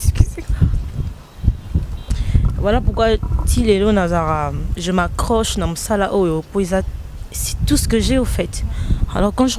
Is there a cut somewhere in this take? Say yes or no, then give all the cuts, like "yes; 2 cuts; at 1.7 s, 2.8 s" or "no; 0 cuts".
yes; 1 cut; at 1.9 s